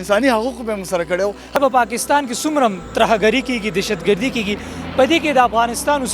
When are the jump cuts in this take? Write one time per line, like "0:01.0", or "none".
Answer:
0:01.6